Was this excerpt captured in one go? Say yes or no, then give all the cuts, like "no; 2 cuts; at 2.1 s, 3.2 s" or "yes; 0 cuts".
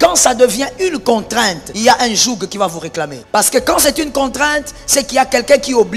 no; 2 cuts; at 1.6 s, 3.2 s